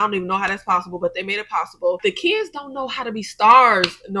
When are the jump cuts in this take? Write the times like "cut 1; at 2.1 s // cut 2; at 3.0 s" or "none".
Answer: cut 1; at 2.0 s